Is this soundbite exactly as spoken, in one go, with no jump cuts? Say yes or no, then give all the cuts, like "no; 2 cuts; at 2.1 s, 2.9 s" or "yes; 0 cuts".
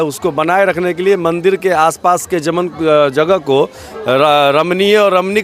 yes; 0 cuts